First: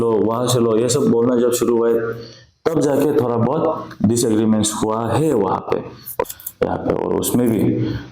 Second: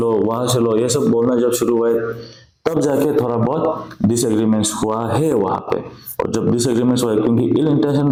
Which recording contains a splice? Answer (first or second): first